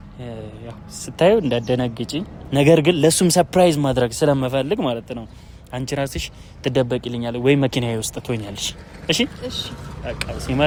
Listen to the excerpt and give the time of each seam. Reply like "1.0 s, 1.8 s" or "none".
none

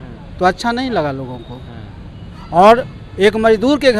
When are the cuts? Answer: none

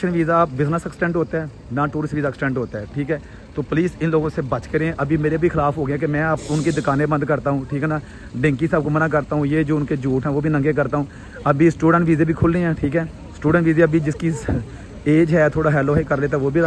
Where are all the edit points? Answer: none

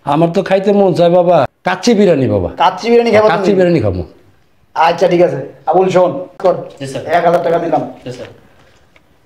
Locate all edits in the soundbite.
1.6 s, 6.4 s

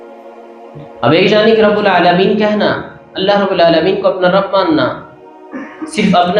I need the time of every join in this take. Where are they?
1.0 s

